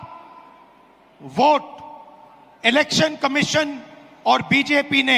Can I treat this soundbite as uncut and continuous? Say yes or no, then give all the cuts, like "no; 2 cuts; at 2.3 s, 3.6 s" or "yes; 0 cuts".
yes; 0 cuts